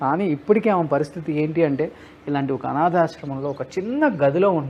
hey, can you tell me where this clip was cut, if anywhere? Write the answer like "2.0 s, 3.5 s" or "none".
none